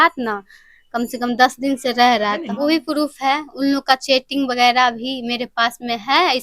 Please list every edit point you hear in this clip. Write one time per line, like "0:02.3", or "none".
0:02.5